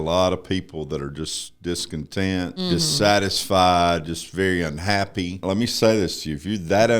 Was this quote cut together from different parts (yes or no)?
yes